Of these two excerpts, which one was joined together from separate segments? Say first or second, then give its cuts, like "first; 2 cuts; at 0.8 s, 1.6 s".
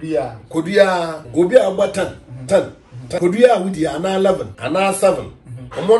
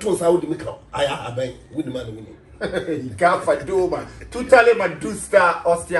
first; 3 cuts; at 1.2 s, 3.2 s, 4.5 s